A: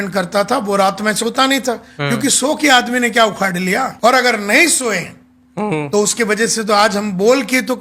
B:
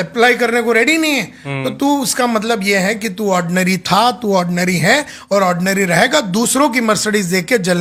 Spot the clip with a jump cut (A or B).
A